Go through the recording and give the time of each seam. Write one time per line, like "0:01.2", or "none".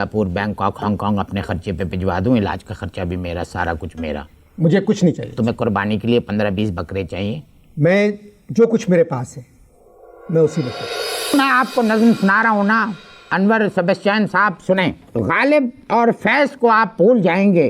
0:11.3
0:15.0